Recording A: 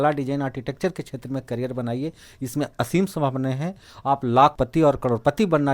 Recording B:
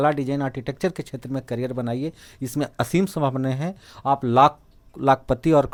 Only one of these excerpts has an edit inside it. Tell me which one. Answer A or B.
A